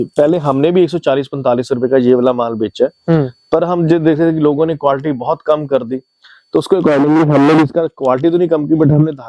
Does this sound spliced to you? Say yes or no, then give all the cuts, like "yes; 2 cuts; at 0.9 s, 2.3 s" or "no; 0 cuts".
no; 0 cuts